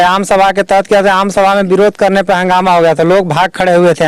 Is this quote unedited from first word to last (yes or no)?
yes